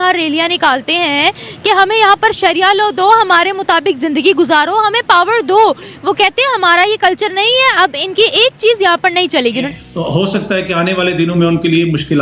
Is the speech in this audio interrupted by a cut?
yes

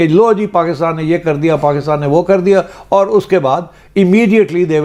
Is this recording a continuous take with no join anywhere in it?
yes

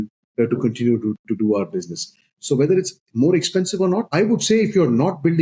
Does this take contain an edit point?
yes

